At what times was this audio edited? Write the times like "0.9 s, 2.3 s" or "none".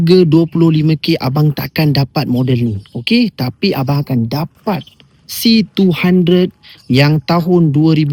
none